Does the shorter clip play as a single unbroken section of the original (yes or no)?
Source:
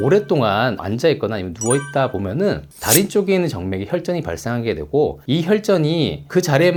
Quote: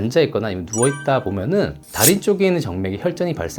yes